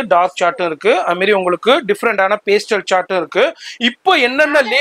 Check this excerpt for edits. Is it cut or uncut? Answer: uncut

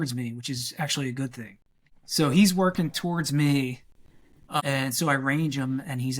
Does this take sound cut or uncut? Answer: cut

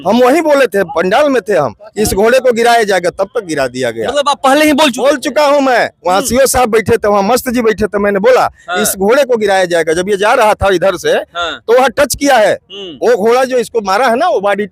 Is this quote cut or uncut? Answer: uncut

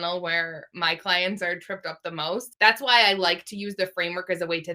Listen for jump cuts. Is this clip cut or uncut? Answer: cut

